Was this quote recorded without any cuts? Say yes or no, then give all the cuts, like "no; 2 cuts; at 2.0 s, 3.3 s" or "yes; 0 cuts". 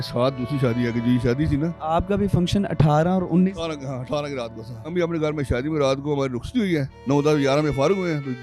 no; 3 cuts; at 1.8 s, 4.9 s, 6.9 s